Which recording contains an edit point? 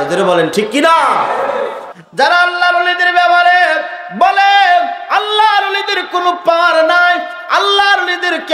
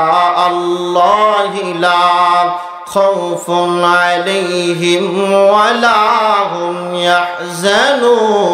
first; 1 cut; at 1.8 s

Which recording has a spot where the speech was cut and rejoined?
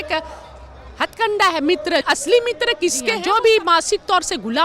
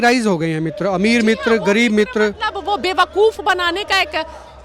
first; 2 cuts; at 2.0 s, 3.2 s

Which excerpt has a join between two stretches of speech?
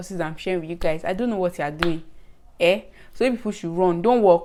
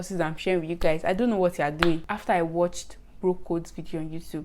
second; 1 cut; at 2.1 s

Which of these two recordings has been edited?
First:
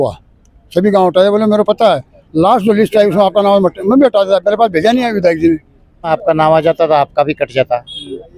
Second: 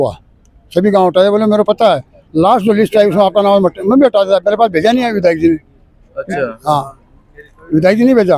first; 1 cut; at 6.1 s

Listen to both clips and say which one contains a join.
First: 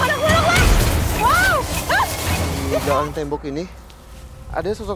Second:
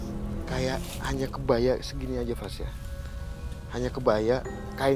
first; 1 cut; at 2.8 s

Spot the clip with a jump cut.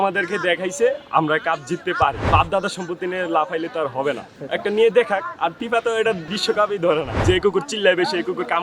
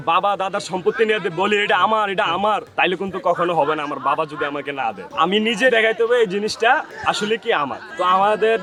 first; 4 cuts; at 2.3 s, 5.6 s, 6.3 s, 7.2 s

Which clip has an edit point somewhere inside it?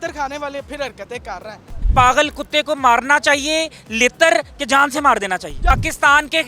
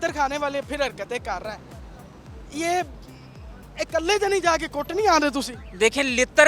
first; 2 cuts; at 1.7 s, 5.7 s

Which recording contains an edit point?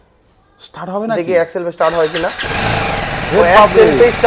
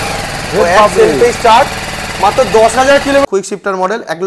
second; 1 cut; at 3.2 s

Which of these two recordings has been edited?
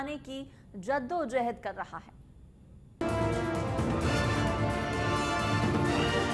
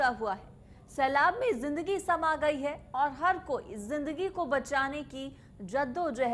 first; 1 cut; at 3.0 s

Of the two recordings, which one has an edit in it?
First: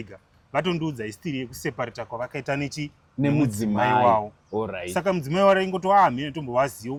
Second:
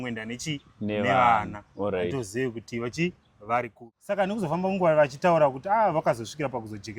second; 1 cut; at 3.9 s

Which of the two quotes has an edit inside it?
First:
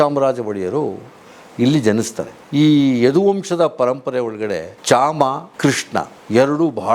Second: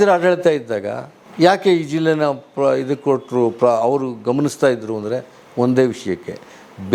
first; 1 cut; at 2.3 s

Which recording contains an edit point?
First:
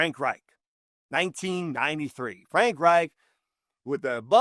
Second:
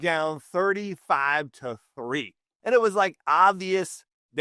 second; 1 cut; at 2.4 s

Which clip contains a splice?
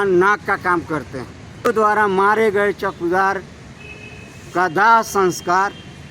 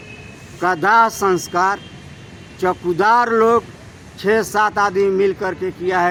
first; 1 cut; at 1.7 s

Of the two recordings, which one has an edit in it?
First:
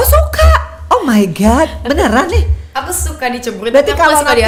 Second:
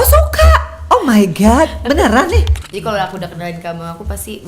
second; 1 cut; at 2.6 s

